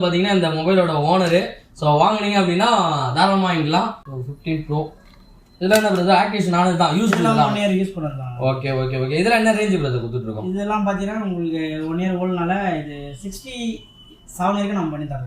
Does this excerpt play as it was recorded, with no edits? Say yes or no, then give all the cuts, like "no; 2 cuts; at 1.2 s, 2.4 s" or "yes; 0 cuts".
no; 1 cut; at 4.0 s